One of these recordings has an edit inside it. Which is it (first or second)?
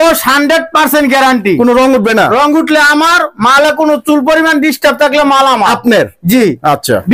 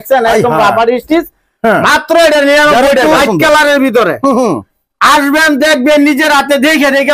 second